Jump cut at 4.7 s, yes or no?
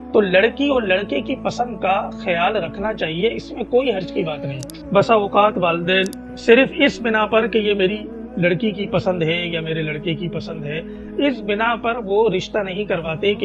yes